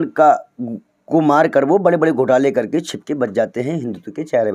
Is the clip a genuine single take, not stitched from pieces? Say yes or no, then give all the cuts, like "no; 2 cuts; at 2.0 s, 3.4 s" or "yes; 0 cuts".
yes; 0 cuts